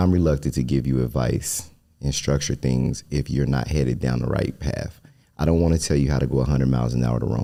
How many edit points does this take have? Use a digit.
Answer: 0